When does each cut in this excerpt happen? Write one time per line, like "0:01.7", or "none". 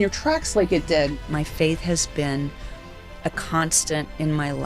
0:01.1